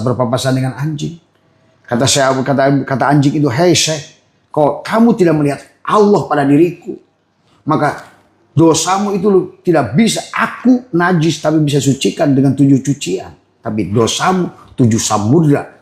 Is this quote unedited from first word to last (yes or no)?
yes